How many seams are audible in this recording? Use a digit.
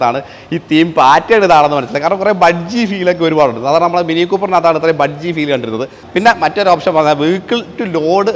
1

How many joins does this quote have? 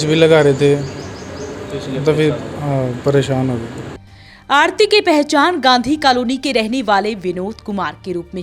0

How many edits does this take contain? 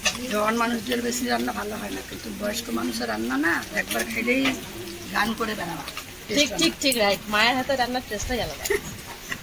1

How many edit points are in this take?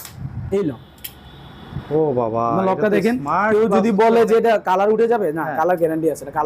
0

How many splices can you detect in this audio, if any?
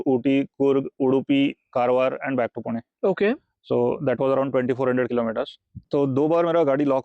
1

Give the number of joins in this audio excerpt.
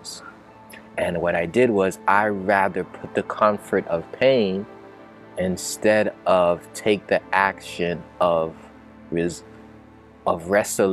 0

